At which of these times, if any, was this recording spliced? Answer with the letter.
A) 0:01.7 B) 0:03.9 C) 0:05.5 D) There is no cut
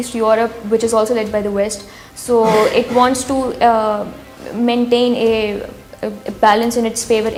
D